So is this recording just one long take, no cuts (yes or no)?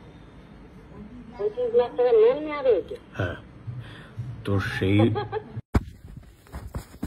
no